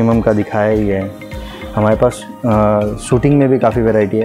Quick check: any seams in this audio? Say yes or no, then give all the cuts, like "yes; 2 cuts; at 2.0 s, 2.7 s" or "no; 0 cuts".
no; 0 cuts